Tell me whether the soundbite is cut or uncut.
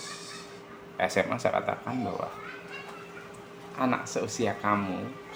uncut